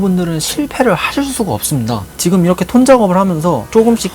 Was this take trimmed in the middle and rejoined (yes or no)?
yes